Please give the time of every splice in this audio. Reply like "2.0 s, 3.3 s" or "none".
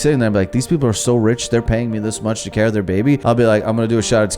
3.2 s